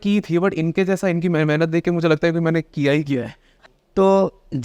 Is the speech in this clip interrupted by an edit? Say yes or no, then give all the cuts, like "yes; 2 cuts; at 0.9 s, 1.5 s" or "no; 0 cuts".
yes; 1 cut; at 3.5 s